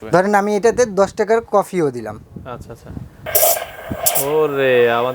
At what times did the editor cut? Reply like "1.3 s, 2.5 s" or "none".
3.2 s